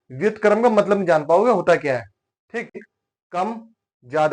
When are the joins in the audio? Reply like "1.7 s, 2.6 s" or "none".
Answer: 2.8 s